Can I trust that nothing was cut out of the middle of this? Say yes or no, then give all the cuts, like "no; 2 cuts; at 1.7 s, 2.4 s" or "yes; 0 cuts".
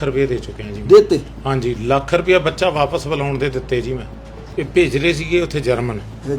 no; 1 cut; at 4.5 s